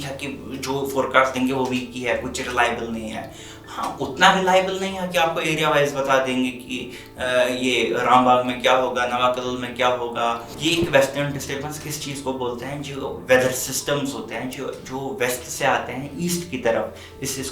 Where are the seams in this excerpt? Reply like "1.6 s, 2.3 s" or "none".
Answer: 10.5 s